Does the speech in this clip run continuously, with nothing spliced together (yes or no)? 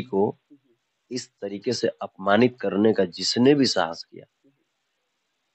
yes